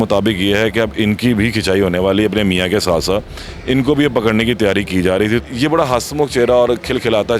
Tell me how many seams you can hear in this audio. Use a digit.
1